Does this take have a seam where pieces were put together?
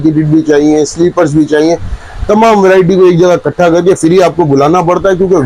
no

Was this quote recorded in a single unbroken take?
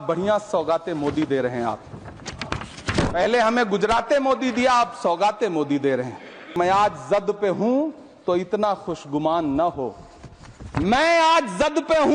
no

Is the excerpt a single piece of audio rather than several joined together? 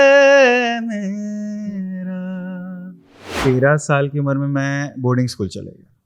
no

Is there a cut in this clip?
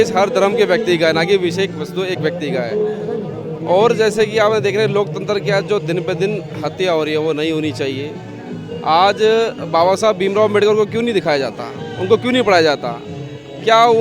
no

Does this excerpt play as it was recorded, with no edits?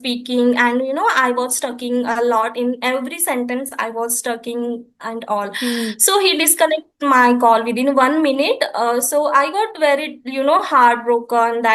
yes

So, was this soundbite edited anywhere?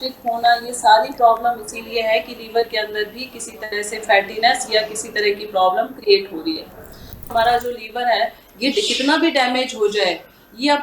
yes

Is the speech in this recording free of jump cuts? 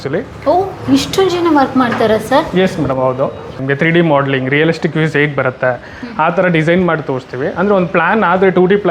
no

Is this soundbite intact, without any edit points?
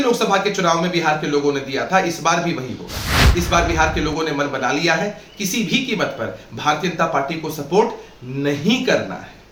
yes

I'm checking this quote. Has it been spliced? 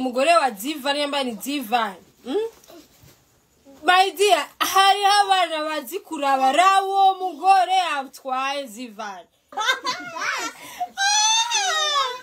no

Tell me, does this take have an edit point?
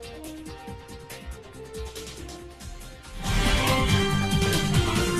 no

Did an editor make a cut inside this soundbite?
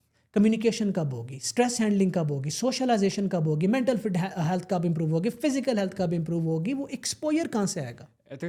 no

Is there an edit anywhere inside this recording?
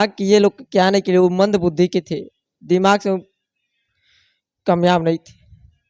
no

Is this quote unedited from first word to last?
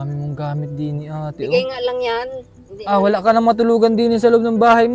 yes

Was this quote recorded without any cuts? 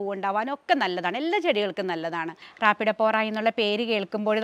no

